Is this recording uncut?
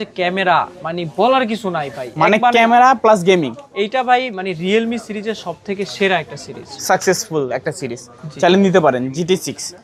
yes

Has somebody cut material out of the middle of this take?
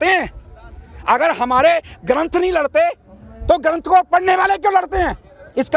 no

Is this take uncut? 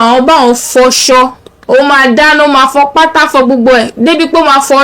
no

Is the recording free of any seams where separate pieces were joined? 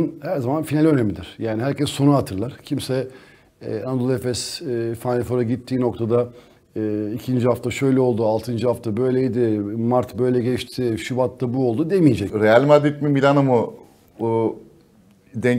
no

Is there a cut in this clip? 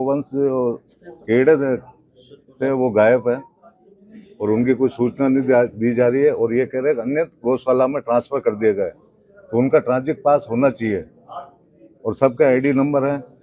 no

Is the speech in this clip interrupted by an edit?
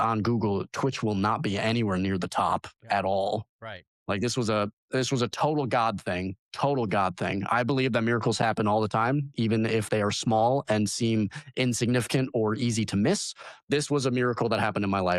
no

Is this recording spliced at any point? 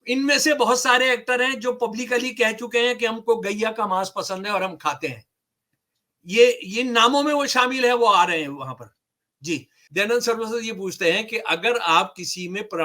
yes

